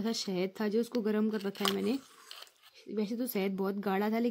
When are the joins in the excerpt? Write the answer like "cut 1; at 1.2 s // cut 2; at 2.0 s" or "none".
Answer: none